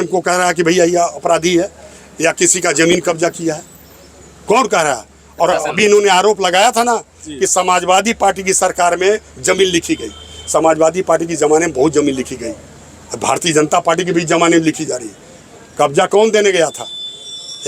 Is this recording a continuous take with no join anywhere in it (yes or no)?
yes